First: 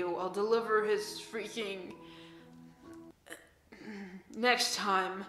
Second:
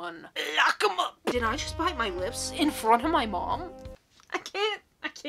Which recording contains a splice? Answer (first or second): second